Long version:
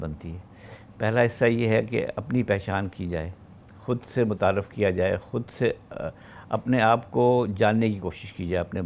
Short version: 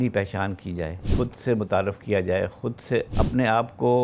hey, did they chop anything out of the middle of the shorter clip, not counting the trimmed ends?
yes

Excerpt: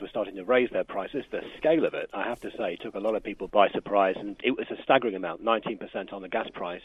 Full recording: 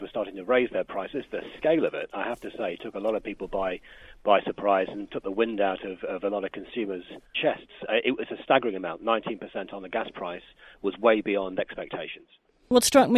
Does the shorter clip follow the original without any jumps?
no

